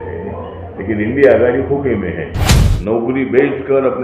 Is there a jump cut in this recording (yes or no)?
yes